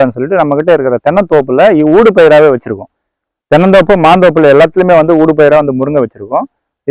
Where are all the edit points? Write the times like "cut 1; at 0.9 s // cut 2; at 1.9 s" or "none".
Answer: none